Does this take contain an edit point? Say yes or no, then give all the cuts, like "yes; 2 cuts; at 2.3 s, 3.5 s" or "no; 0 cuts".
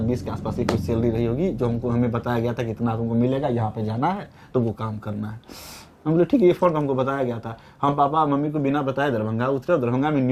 no; 0 cuts